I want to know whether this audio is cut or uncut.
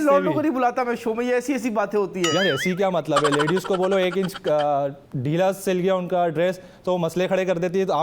uncut